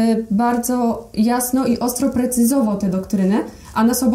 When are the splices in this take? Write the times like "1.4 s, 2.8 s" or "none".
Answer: none

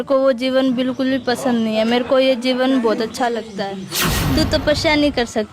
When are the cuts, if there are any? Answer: 4.1 s

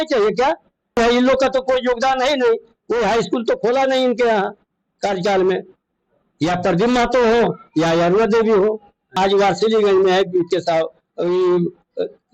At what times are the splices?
1.0 s, 9.1 s

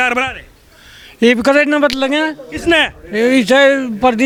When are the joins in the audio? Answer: none

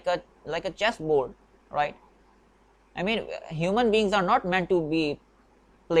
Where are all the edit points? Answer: none

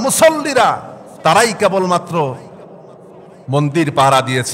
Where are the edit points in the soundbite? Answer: none

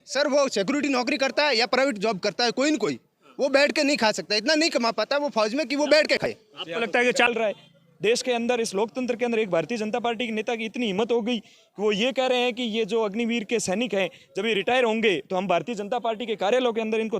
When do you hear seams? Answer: 7.3 s

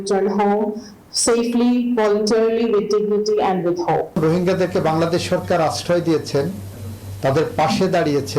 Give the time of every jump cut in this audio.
4.2 s

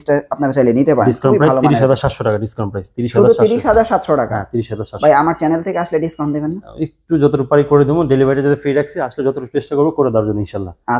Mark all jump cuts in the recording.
none

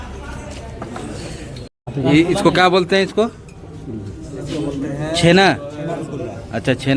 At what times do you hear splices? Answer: 1.4 s

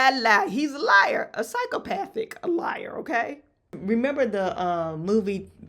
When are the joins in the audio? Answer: 3.8 s

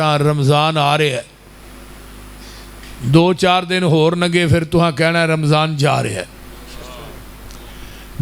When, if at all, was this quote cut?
none

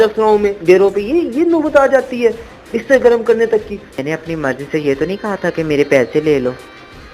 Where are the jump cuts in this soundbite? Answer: 3.9 s

